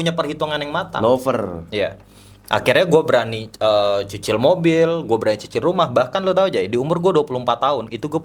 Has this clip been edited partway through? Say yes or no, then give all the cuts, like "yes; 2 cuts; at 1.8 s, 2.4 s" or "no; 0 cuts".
no; 0 cuts